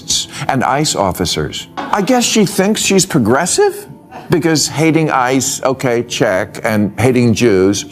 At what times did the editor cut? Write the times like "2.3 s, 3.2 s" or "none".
1.8 s